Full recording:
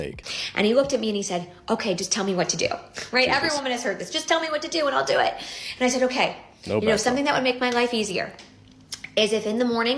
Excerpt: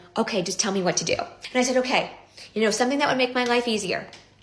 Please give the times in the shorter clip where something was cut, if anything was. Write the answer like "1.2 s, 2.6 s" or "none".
1.4 s